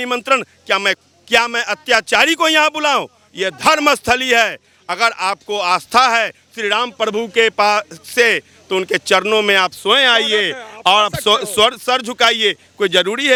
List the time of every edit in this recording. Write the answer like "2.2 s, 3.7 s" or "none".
none